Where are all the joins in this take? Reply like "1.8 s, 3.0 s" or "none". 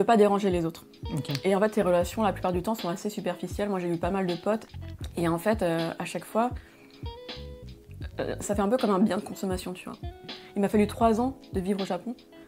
4.7 s, 10.2 s